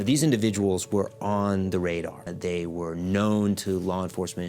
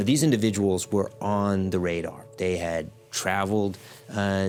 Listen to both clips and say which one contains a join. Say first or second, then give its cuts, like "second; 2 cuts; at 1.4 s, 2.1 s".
first; 1 cut; at 2.2 s